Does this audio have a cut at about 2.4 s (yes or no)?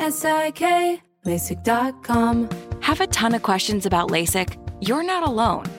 yes